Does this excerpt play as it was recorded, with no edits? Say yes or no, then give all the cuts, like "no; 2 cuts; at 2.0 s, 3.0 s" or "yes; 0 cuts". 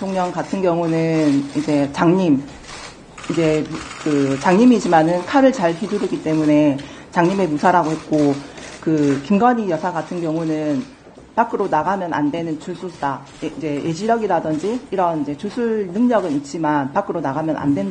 yes; 0 cuts